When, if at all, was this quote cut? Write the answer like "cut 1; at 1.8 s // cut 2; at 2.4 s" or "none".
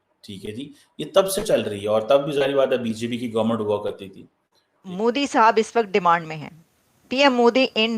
cut 1; at 4.9 s